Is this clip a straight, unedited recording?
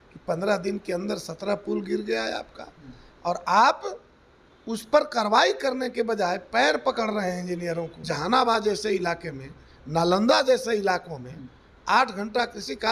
no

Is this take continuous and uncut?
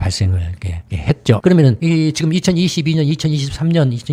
yes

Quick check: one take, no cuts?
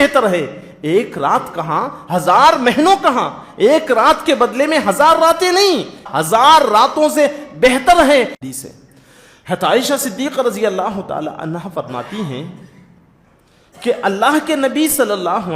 no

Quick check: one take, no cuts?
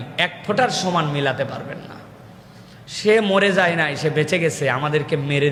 yes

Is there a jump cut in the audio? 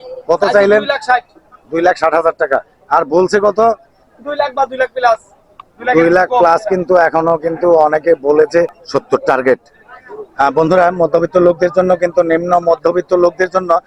yes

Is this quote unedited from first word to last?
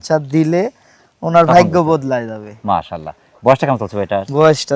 yes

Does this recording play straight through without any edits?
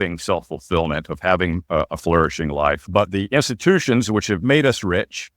no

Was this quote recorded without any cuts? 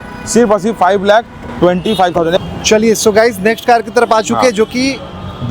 yes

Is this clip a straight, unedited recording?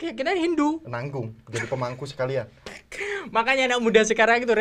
yes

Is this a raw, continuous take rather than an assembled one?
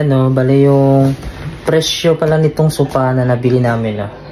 yes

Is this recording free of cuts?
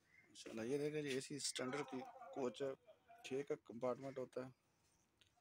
yes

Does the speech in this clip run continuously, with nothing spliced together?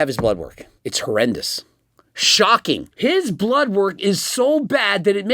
no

